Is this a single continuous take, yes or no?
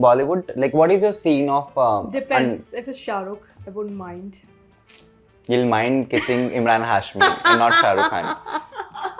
yes